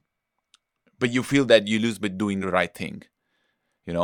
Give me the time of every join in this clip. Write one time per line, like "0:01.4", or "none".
0:02.4